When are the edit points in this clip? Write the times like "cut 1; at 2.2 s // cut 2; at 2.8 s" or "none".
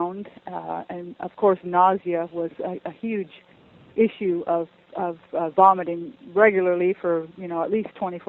none